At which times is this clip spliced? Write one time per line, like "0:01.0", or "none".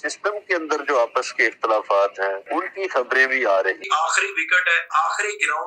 0:02.4
0:03.8